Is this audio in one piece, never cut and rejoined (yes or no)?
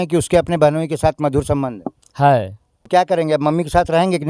no